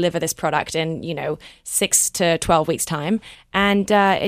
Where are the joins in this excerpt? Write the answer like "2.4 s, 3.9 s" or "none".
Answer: 3.4 s

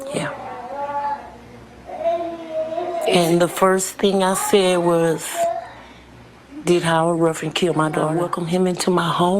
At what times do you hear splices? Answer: 8.2 s

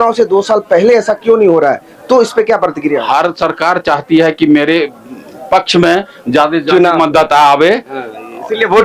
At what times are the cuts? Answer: none

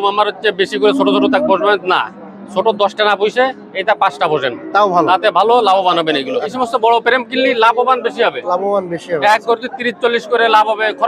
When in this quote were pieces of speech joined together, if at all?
6.5 s

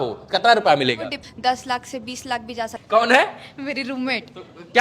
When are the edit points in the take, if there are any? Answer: 1.2 s, 2.8 s

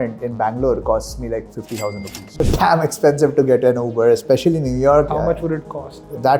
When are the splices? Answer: 2.4 s, 5.1 s

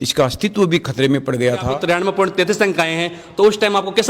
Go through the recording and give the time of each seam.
1.7 s

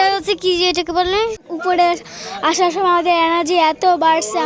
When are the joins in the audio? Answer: 1.4 s

